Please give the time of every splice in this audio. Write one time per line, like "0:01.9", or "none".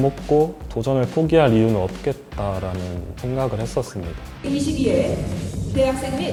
none